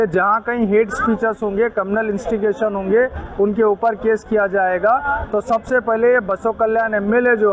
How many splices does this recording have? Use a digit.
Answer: 0